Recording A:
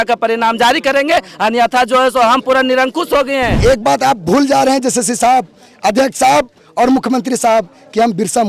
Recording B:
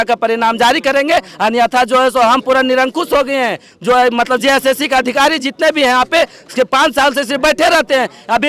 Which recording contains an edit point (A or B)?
A